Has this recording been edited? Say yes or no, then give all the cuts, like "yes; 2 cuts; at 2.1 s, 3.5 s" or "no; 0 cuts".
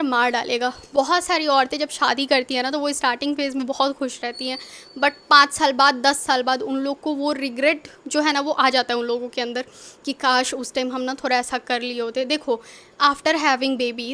no; 0 cuts